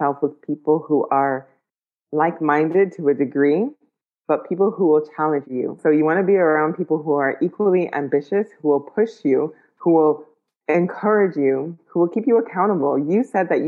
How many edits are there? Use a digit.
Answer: 1